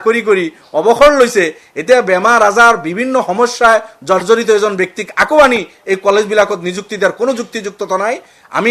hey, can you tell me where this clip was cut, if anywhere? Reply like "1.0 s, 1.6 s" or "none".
none